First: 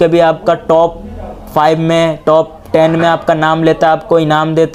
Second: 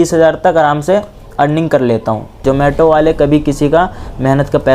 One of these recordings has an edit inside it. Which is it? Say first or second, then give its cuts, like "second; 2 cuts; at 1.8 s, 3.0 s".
second; 1 cut; at 2.4 s